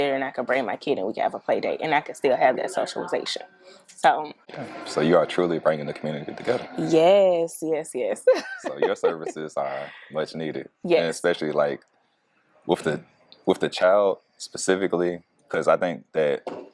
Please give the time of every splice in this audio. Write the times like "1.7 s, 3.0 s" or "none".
none